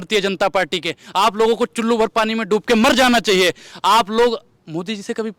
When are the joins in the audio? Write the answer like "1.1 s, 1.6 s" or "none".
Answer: none